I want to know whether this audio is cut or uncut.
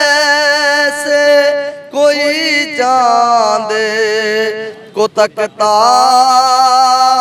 uncut